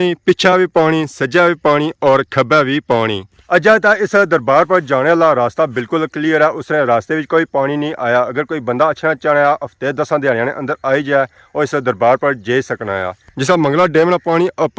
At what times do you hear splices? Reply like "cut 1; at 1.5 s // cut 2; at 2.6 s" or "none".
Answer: none